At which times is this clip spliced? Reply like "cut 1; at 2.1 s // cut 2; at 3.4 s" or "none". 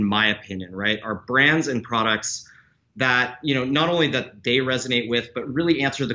none

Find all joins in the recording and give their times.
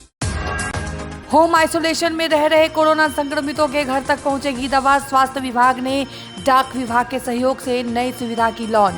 cut 1; at 1.1 s

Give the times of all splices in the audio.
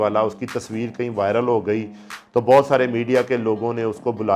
none

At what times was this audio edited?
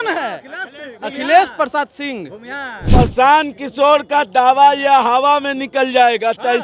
cut 1; at 2.9 s

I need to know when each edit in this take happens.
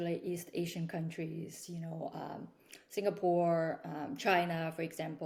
none

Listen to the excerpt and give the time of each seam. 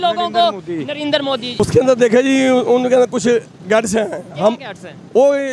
cut 1; at 1.6 s

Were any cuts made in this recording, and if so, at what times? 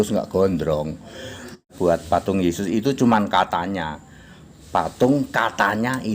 cut 1; at 1.7 s

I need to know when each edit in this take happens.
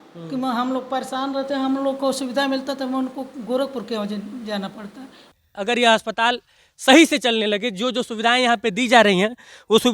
cut 1; at 5.3 s

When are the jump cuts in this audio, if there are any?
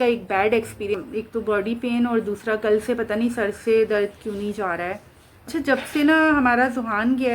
cut 1; at 1.0 s // cut 2; at 5.5 s

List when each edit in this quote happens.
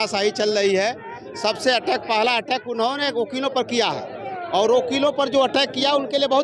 none

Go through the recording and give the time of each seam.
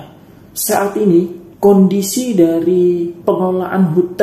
cut 1; at 3.1 s

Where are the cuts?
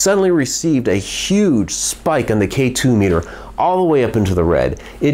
none

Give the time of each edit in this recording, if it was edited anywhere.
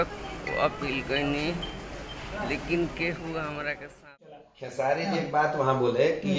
cut 1; at 4.4 s

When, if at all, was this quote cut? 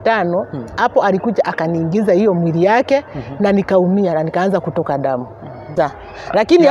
cut 1; at 5.7 s

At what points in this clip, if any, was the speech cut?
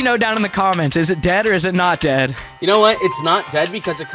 cut 1; at 2.5 s

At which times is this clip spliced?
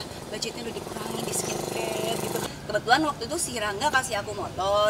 cut 1; at 2.4 s

